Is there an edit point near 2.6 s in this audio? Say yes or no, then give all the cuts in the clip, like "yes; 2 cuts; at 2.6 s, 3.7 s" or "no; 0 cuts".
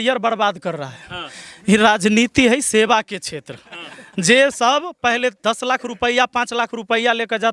no; 0 cuts